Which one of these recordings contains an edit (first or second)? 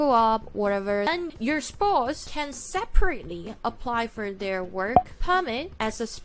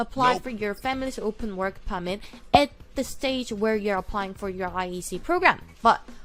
first